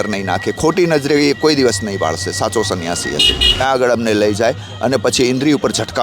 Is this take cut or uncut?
cut